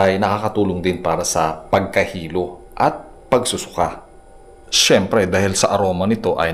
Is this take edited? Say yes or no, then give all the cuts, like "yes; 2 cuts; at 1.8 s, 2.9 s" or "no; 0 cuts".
no; 0 cuts